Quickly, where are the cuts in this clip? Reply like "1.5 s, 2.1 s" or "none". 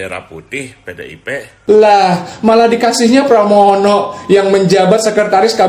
1.5 s